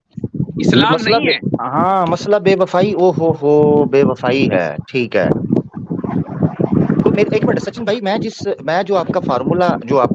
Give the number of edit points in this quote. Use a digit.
0